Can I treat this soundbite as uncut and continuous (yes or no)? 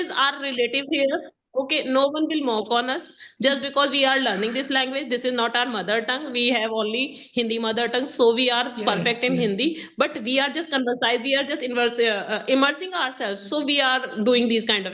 yes